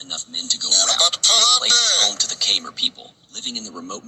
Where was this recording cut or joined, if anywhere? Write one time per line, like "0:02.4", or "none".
none